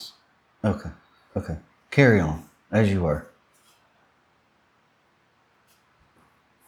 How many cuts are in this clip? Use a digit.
0